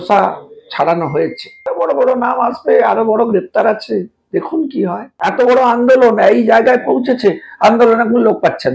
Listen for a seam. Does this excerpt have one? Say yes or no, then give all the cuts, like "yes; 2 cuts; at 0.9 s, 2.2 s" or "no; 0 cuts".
yes; 2 cuts; at 1.7 s, 5.1 s